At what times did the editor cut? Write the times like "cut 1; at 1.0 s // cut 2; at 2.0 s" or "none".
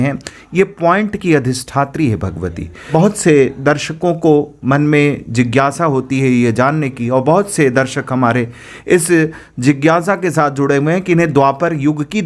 cut 1; at 2.9 s